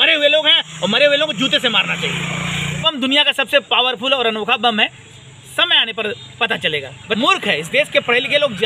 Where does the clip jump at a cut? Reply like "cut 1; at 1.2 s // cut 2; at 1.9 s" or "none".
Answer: cut 1; at 2.9 s // cut 2; at 7.2 s

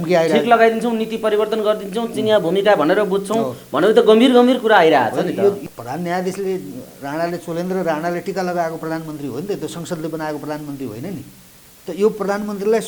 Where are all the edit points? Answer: cut 1; at 5.6 s

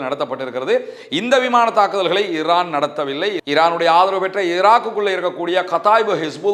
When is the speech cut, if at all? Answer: none

